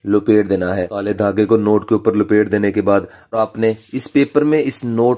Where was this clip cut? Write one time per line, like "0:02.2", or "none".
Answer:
0:00.9
0:03.3